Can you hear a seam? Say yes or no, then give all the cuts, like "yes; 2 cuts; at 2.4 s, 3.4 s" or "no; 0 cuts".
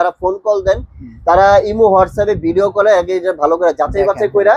no; 0 cuts